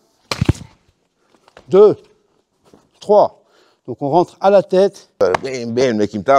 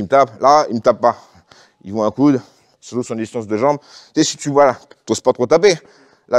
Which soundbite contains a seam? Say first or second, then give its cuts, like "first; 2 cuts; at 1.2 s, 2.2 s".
first; 1 cut; at 5.2 s